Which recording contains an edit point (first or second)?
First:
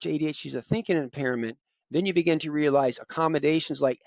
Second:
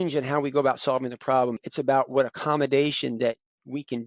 second